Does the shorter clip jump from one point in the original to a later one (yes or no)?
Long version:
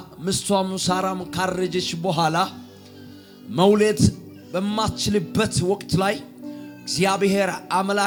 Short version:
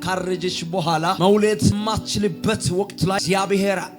yes